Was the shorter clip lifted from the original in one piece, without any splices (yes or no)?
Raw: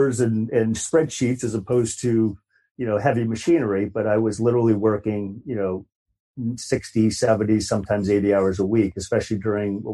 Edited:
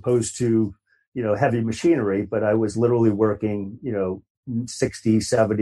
no